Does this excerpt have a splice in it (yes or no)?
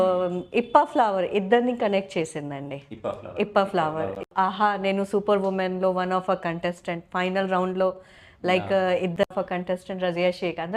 yes